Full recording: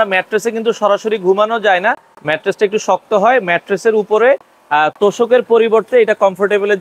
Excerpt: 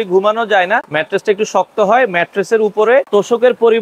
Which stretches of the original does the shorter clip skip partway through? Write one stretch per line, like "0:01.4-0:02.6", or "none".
0:02.1-0:02.3
0:04.4-0:05.0